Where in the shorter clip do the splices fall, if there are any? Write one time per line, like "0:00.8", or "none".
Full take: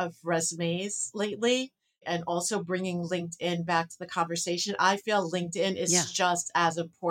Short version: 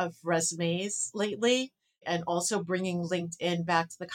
none